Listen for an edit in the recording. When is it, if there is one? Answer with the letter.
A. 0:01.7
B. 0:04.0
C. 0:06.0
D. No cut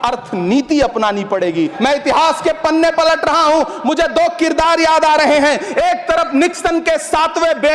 A